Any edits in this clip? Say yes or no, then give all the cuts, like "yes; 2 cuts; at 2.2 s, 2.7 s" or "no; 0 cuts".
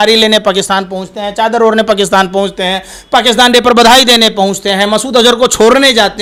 no; 0 cuts